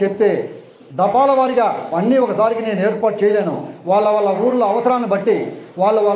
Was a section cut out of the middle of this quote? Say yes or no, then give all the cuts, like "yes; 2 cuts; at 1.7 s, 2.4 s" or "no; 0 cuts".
no; 0 cuts